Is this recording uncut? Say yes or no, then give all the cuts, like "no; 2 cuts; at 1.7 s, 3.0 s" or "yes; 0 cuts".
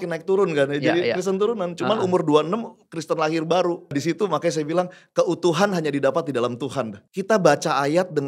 no; 2 cuts; at 4.0 s, 7.0 s